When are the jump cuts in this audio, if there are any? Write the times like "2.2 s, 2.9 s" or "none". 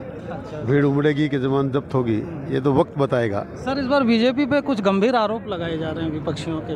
none